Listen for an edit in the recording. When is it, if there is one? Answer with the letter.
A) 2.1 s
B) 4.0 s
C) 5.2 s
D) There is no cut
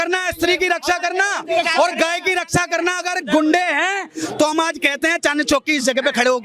D